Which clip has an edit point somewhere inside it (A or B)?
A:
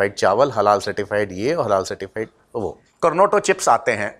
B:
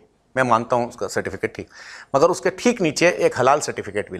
A